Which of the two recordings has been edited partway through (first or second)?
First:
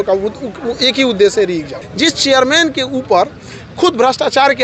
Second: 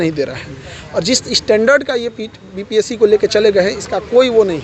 first